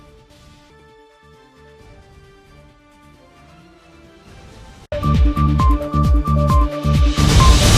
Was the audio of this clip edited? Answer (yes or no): no